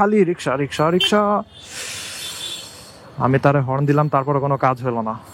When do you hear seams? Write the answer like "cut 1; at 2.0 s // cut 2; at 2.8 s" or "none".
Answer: none